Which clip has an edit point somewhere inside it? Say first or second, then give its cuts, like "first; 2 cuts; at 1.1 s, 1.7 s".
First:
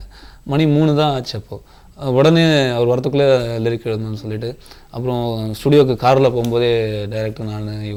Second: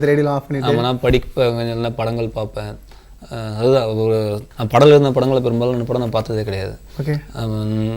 second; 1 cut; at 4.5 s